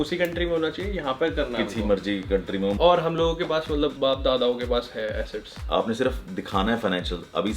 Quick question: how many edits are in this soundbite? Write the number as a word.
two